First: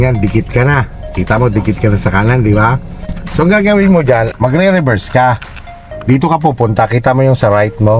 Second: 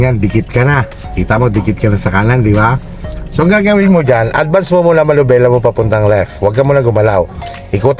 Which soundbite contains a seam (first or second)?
first